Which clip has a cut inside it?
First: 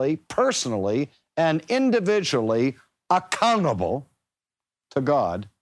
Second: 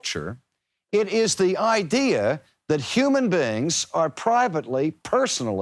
first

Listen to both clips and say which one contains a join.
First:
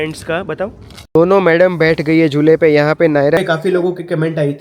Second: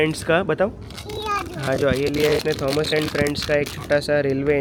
first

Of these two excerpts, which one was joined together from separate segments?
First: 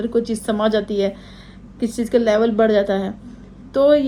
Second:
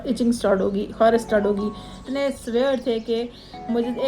second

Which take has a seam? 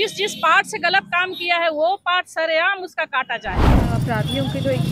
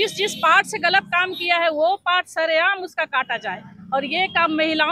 first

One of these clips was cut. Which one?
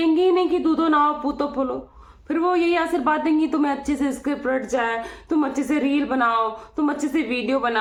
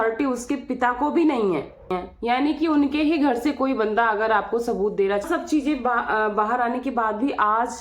second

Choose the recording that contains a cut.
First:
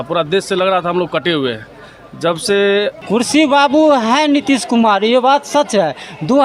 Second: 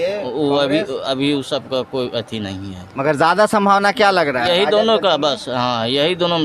first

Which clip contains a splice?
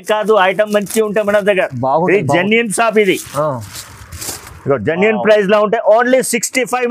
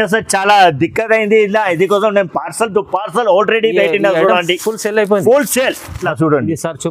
second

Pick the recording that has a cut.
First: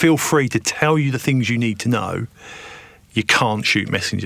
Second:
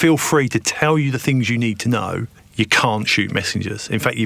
second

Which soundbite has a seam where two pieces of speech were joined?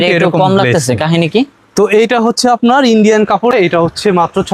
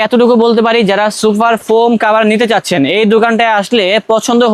first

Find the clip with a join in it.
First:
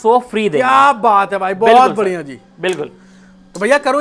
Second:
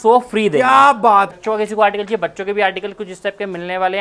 second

